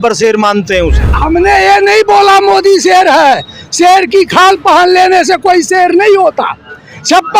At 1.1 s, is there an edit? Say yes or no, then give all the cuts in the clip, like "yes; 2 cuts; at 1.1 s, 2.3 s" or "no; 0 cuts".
yes; 1 cut; at 1.1 s